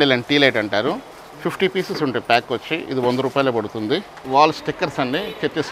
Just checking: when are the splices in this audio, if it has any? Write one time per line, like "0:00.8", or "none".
0:04.1

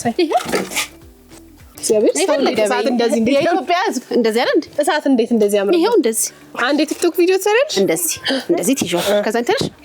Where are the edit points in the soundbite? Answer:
0:01.7

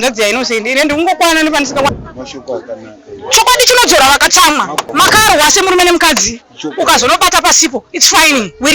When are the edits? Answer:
0:01.9
0:04.9

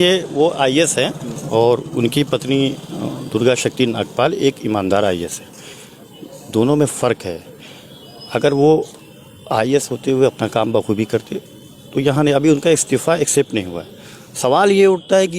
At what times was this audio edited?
none

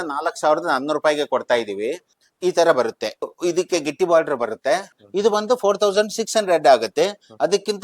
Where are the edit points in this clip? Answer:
0:02.1
0:03.3
0:05.0

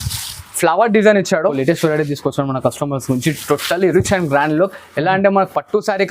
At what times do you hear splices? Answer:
0:01.6

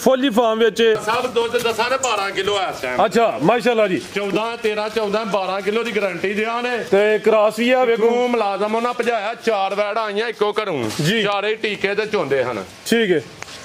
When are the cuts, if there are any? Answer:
0:01.0

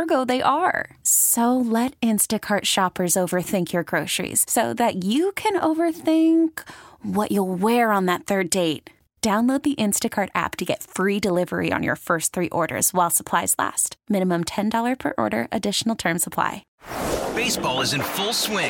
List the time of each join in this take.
0:16.7

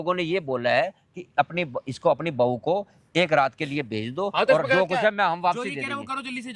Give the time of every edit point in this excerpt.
none

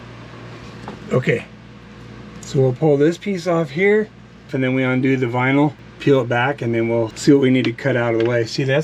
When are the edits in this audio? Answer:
0:04.5
0:05.9
0:07.1

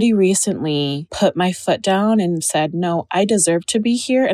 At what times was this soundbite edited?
0:01.0
0:02.5

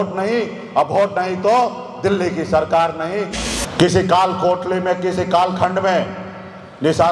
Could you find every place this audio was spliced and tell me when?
0:03.4

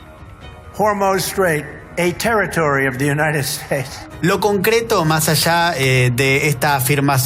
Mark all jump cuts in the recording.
0:04.0

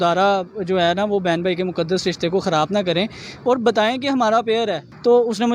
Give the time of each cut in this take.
none

